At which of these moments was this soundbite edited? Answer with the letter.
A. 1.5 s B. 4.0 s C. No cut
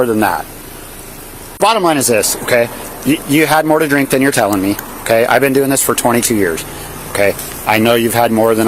A